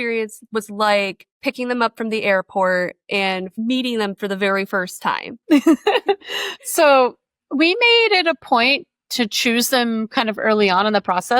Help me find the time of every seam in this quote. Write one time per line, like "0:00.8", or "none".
0:01.2
0:05.3